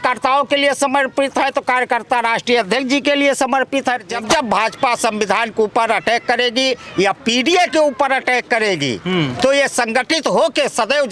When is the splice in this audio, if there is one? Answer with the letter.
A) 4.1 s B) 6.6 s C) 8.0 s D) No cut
A